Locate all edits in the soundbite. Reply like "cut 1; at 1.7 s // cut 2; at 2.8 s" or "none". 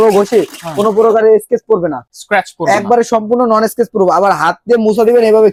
none

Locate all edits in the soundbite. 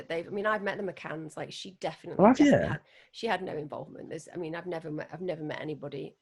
none

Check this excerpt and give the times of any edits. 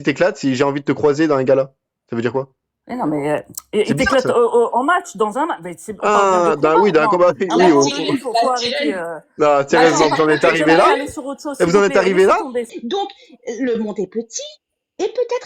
cut 1; at 12.6 s

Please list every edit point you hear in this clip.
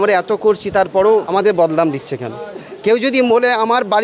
cut 1; at 1.3 s

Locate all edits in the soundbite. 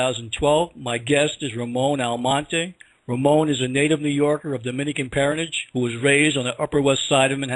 cut 1; at 6.0 s

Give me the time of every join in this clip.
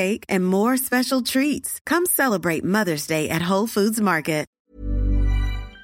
cut 1; at 4.6 s

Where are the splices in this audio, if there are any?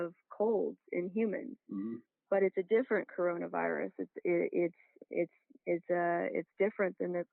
none

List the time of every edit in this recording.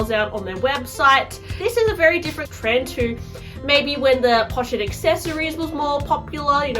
cut 1; at 1.5 s // cut 2; at 2.5 s

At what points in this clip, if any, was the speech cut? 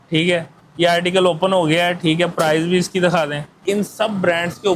cut 1; at 3.6 s

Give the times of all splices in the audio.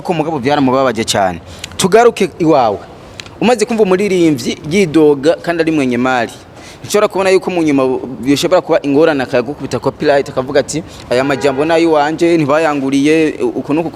none

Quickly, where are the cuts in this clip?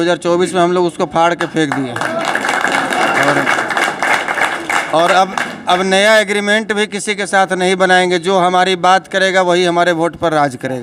none

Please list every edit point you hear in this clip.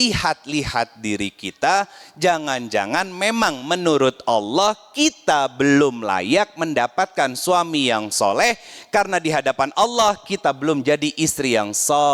none

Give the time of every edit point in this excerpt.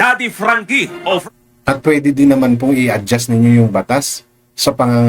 cut 1; at 1.2 s

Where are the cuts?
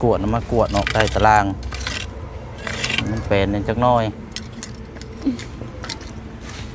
none

